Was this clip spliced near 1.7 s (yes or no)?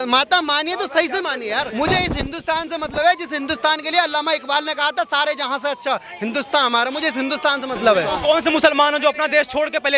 yes